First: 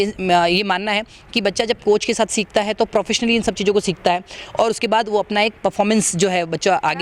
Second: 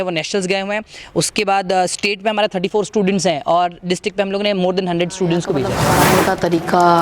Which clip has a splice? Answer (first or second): second